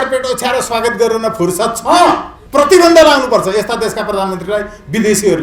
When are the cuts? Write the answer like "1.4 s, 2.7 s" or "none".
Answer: 2.3 s